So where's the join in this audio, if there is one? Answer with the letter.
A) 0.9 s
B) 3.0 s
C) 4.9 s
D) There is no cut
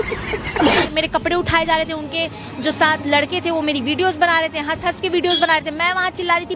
A